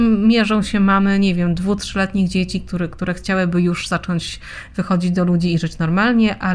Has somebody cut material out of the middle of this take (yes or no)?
no